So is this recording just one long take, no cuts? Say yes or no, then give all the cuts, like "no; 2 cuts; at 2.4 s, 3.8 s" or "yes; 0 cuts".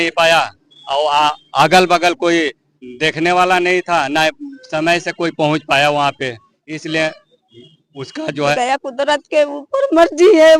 no; 1 cut; at 8.5 s